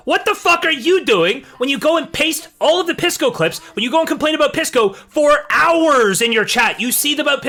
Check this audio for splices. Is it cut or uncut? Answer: uncut